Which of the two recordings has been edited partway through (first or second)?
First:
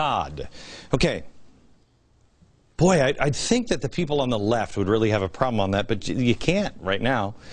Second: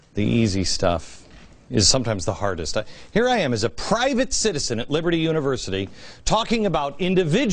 first